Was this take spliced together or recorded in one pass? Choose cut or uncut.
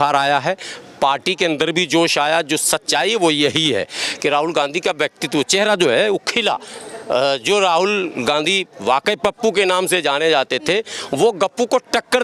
uncut